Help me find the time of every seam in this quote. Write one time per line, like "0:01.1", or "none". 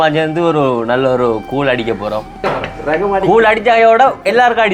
0:02.4